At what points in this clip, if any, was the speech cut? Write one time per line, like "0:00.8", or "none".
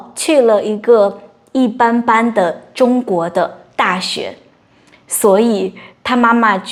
none